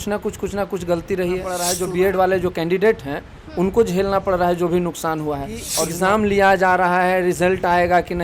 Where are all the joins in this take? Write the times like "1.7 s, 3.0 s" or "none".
1.7 s, 5.7 s